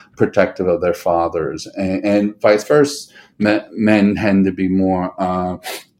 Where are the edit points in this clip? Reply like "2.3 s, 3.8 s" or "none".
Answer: none

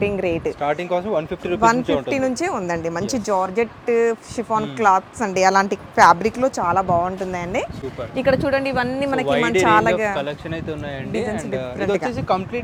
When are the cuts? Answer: none

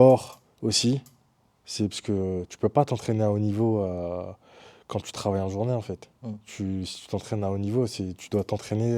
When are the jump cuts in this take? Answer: none

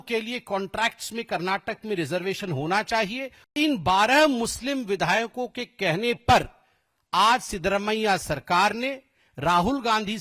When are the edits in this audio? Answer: 3.5 s

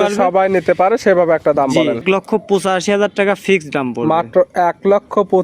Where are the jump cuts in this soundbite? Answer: 2.0 s

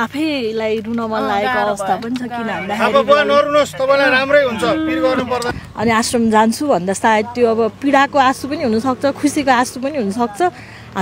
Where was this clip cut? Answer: 5.4 s

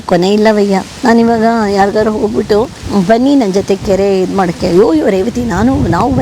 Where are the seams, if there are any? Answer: 0.9 s, 2.8 s

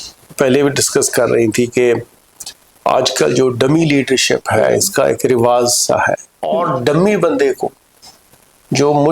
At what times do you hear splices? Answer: 6.3 s

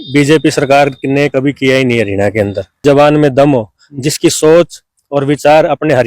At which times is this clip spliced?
2.8 s

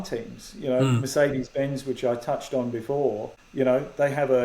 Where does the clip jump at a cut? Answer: 3.4 s

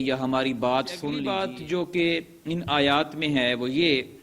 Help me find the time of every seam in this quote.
1.2 s

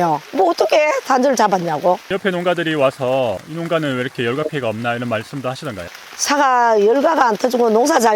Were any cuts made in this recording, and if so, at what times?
2.1 s, 5.8 s

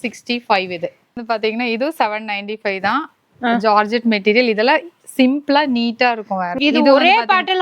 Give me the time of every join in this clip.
1.2 s, 6.5 s

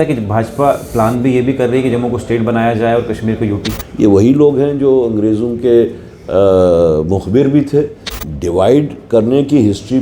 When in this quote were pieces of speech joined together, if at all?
3.7 s, 8.1 s

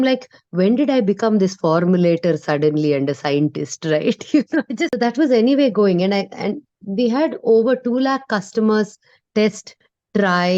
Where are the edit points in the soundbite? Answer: 5.0 s

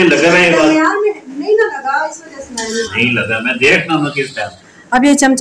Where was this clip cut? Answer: 4.4 s

